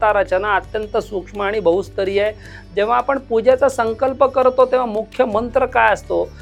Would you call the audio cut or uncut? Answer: uncut